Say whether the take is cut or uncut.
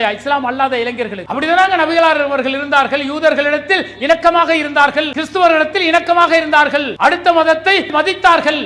cut